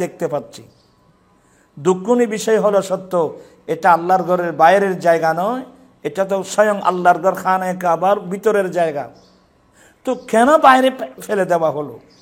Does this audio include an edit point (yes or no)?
yes